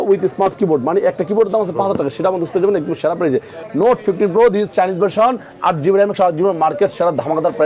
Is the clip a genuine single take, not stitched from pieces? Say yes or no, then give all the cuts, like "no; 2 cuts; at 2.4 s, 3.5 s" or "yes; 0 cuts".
no; 1 cut; at 3.6 s